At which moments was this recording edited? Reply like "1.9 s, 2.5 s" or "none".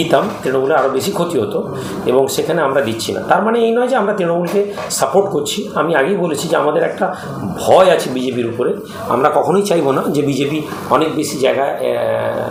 none